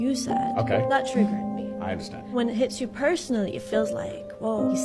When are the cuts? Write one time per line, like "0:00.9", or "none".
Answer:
none